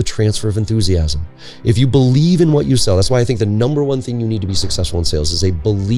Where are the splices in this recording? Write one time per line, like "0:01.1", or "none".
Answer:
none

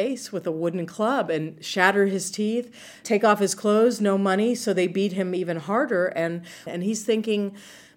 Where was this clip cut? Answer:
0:03.0
0:06.6

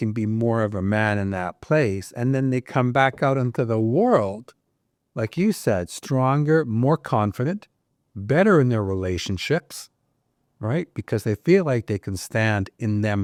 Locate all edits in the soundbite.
none

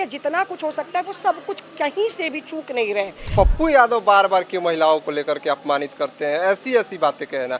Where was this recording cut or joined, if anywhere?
0:03.2

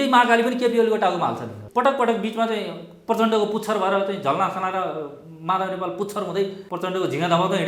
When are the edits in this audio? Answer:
0:01.6
0:06.6

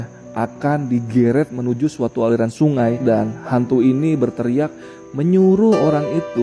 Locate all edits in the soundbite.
0:03.0

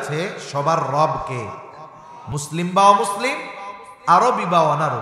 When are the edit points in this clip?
0:02.3

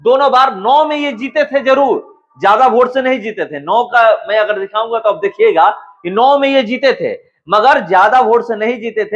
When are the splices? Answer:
none

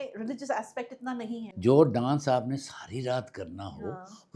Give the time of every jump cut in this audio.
0:01.4

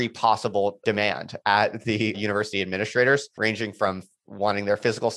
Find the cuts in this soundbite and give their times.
0:00.8
0:02.2
0:03.4

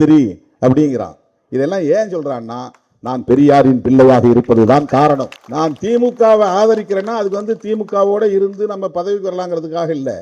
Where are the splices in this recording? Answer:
0:05.4

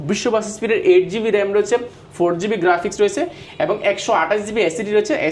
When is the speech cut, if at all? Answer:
none

